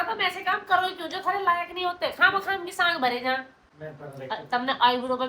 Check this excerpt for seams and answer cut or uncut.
cut